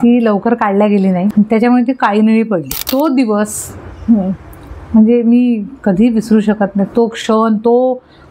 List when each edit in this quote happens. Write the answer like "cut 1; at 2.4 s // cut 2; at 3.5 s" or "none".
cut 1; at 1.3 s // cut 2; at 2.8 s